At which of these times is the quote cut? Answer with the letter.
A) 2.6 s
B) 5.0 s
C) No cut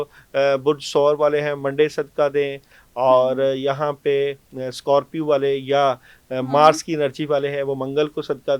C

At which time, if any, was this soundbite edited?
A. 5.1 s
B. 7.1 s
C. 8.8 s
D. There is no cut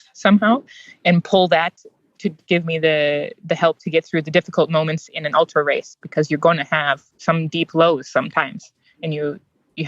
B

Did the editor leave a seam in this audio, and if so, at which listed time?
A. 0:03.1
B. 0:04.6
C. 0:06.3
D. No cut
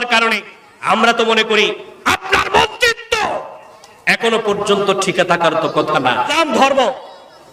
C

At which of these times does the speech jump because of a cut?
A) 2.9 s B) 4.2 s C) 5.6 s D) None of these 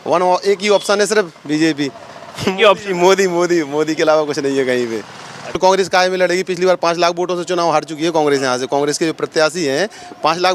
C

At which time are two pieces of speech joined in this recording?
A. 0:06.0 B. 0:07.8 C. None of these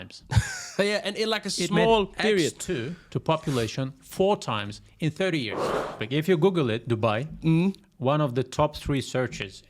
A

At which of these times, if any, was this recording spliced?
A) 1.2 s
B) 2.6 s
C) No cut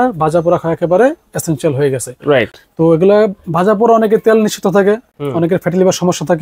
C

